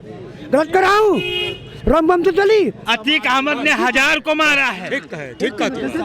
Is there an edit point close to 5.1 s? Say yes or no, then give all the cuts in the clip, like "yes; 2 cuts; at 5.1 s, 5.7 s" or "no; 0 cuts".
no; 1 cut; at 2.9 s